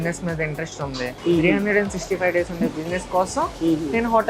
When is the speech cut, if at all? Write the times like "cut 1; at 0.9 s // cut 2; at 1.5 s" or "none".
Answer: cut 1; at 1.1 s